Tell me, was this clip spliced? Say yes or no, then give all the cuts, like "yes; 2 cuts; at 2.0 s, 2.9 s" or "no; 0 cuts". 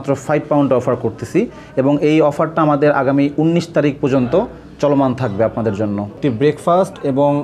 no; 0 cuts